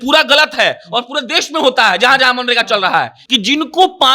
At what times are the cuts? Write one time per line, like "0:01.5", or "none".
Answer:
0:03.2